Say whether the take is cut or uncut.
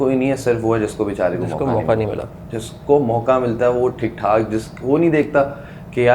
uncut